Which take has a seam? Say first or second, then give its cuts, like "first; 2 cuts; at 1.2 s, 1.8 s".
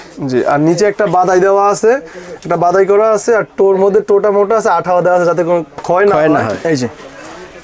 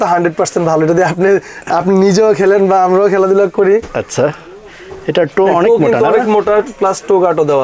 first; 1 cut; at 6.6 s